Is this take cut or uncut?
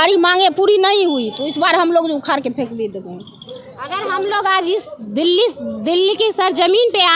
uncut